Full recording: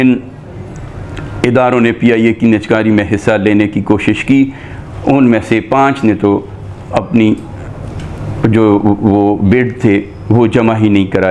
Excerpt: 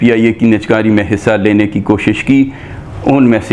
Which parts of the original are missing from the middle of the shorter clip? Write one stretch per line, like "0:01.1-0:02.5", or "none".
none